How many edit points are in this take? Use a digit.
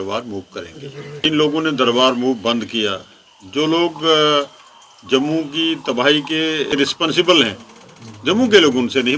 2